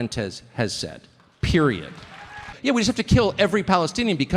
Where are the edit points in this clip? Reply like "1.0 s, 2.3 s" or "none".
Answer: 2.5 s